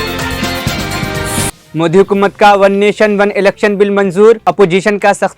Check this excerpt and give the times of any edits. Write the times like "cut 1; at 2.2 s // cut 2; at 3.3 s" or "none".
cut 1; at 1.5 s